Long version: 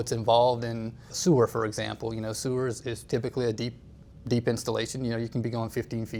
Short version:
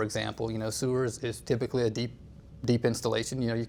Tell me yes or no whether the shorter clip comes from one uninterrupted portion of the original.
yes